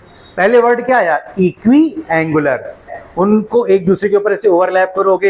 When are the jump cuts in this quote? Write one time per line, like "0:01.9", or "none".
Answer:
0:03.0